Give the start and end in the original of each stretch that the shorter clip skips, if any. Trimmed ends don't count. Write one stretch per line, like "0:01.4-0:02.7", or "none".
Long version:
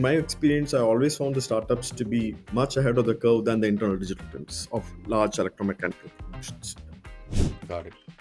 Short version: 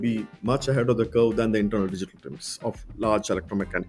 none